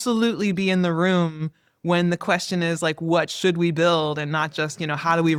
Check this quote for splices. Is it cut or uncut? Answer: uncut